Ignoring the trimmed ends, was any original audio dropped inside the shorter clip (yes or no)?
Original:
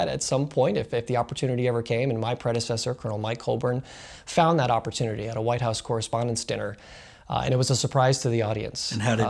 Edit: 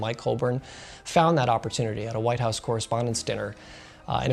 no